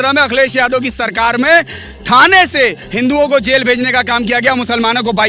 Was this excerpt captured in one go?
yes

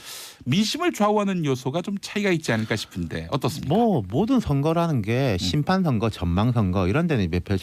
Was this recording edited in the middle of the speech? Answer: yes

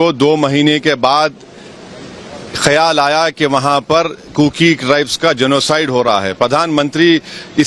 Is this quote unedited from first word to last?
yes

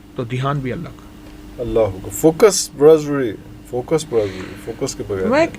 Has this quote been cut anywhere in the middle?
no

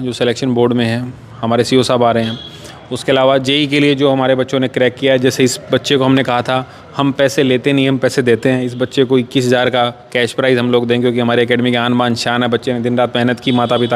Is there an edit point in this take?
no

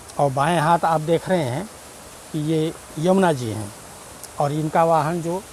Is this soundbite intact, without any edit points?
yes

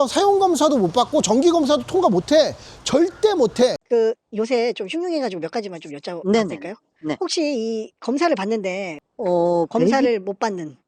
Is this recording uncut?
no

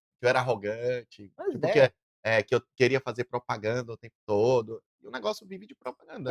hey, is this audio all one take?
yes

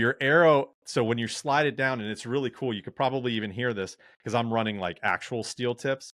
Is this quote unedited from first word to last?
yes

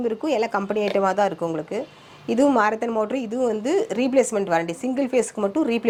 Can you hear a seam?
no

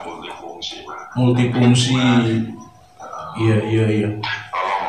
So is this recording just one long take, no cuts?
yes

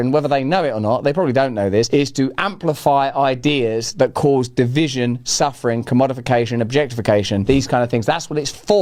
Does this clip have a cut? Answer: no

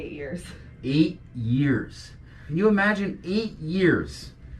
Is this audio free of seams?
no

